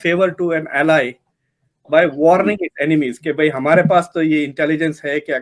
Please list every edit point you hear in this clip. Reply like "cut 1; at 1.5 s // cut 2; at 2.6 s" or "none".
none